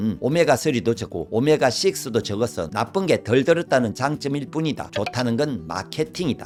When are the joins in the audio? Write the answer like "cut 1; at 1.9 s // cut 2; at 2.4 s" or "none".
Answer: none